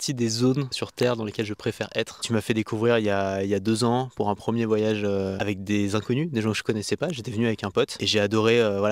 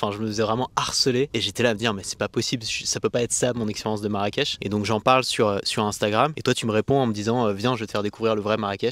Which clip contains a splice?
first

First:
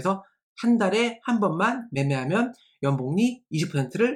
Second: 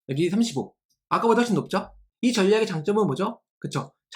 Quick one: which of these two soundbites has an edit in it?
second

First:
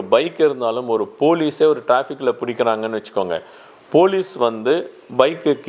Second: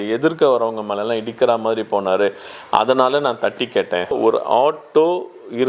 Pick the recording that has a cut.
second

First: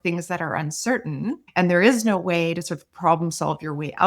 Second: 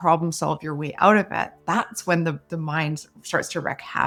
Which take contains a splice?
first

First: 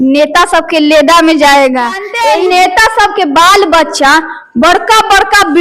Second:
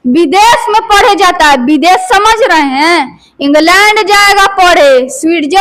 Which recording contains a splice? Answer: first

